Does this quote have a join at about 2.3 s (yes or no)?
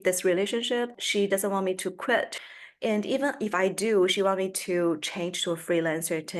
yes